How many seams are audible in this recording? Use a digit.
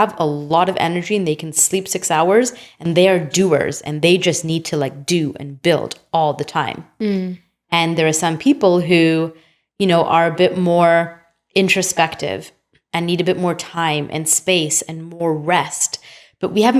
0